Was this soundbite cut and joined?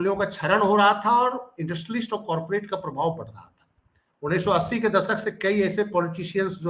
no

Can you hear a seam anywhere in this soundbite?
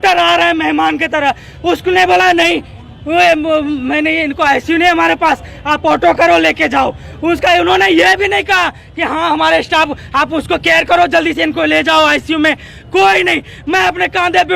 no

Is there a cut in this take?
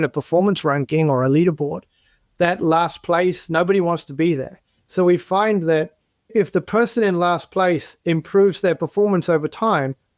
no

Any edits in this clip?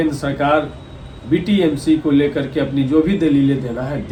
no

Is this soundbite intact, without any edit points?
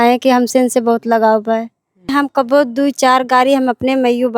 no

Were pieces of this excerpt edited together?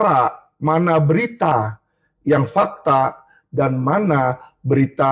no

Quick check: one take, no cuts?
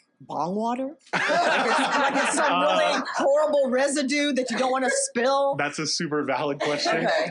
yes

